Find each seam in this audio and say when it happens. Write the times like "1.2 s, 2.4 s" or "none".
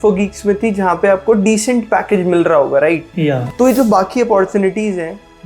none